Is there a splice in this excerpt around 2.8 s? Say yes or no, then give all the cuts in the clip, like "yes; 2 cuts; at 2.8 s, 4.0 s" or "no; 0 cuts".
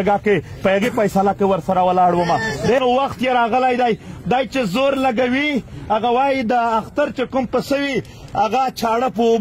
yes; 1 cut; at 2.8 s